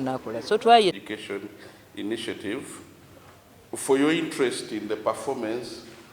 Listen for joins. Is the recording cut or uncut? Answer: cut